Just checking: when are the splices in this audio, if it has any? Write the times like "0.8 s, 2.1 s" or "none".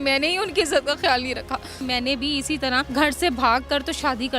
1.8 s, 2.9 s